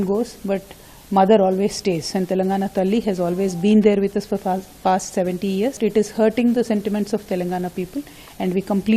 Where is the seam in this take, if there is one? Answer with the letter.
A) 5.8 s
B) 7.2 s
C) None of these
A